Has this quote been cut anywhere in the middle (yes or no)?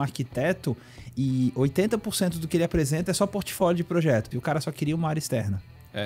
yes